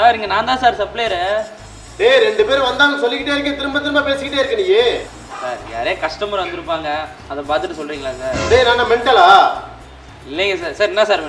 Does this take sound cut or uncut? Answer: cut